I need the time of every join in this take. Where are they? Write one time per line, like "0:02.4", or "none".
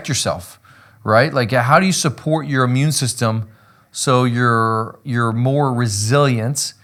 none